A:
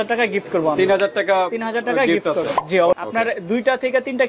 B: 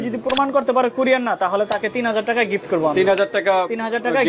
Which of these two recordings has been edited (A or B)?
A